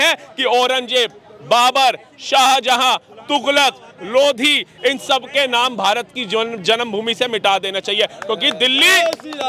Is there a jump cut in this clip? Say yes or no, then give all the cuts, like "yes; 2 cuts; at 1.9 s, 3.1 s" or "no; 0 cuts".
no; 0 cuts